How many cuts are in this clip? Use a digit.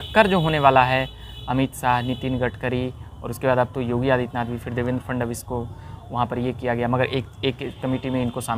0